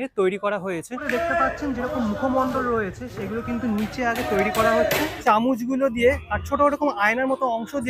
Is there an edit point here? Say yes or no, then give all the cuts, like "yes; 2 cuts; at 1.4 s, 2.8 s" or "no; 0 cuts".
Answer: yes; 2 cuts; at 1.1 s, 5.1 s